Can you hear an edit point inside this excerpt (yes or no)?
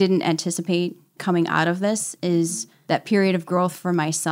yes